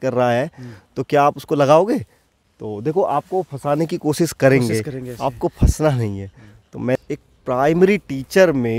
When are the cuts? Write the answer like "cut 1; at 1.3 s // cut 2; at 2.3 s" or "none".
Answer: cut 1; at 7.0 s